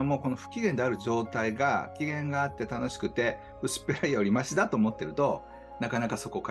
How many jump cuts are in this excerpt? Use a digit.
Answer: 0